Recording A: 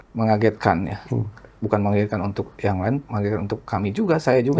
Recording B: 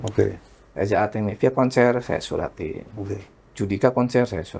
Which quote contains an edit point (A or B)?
B